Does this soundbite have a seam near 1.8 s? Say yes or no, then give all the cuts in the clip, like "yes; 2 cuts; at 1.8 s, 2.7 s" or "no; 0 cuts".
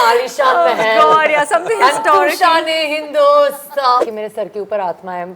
no; 1 cut; at 4.0 s